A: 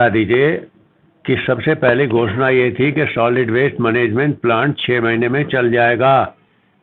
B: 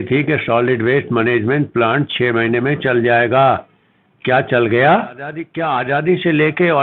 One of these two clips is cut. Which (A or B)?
B